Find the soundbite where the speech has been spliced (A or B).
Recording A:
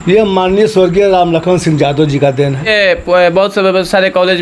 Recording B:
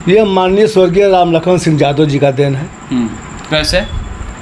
A